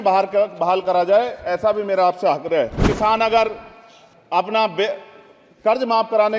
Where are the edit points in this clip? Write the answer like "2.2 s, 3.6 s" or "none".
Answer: 2.9 s